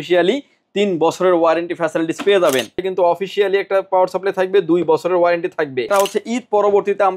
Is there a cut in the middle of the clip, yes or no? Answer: yes